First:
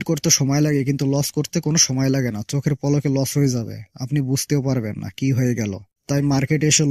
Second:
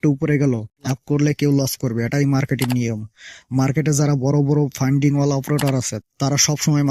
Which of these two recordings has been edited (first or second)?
second